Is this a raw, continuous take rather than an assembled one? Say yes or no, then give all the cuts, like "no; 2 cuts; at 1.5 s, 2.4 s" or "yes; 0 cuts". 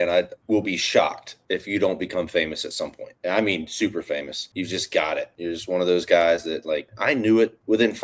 yes; 0 cuts